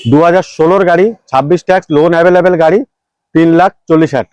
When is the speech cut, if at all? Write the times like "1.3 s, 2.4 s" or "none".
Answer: none